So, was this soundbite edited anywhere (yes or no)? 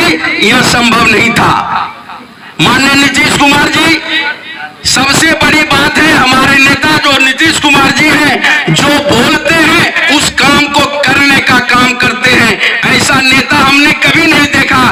no